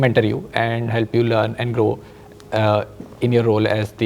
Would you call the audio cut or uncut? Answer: uncut